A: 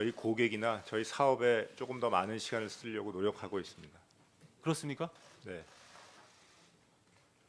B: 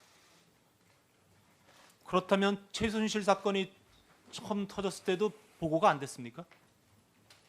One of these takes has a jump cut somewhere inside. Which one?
A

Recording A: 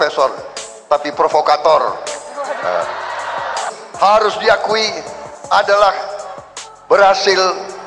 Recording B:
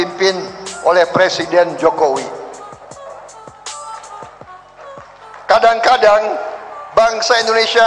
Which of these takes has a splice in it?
A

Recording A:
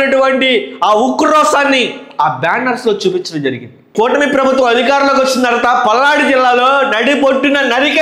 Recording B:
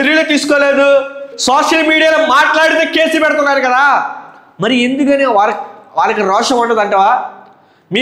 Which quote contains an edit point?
B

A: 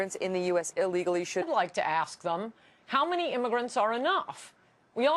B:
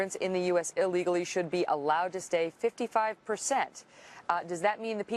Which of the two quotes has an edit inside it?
B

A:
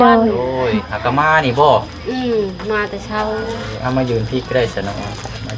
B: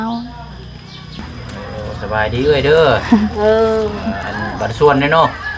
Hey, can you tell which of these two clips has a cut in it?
B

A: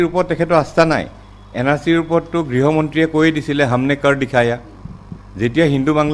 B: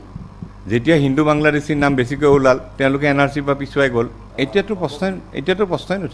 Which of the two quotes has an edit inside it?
B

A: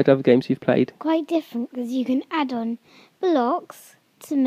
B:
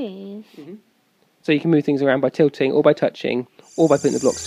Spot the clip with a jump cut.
A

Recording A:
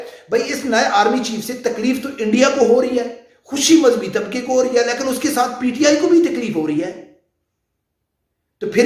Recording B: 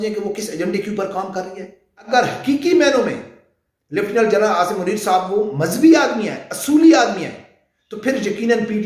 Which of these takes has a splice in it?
B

